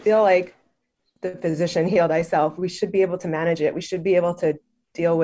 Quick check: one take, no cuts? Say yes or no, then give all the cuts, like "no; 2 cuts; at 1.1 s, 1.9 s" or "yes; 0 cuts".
yes; 0 cuts